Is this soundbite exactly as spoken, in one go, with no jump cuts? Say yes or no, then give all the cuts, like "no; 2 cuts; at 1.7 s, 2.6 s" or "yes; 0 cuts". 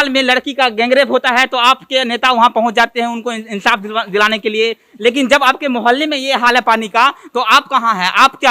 yes; 0 cuts